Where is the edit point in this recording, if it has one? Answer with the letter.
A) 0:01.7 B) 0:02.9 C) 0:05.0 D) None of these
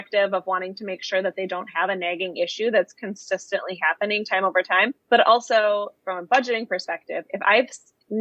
C